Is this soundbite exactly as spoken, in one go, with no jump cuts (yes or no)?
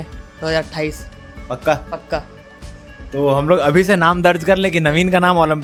yes